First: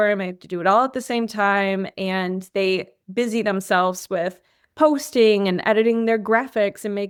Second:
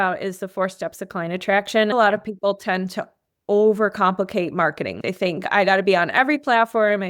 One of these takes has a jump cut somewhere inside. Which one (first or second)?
second